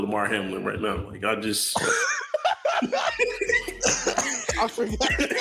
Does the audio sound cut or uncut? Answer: uncut